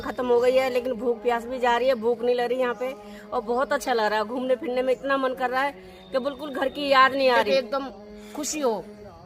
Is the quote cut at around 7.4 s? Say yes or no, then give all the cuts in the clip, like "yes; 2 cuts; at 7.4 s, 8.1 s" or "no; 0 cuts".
yes; 1 cut; at 7.4 s